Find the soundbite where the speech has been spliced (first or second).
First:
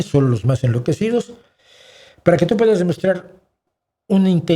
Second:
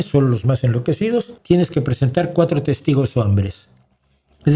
second